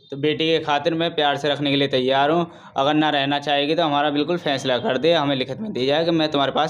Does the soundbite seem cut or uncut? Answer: uncut